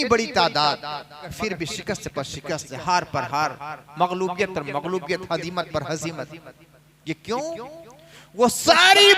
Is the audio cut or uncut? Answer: cut